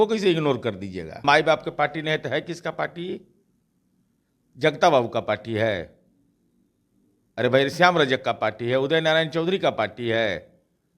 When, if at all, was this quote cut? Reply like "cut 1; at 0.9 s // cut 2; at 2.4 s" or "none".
cut 1; at 1.2 s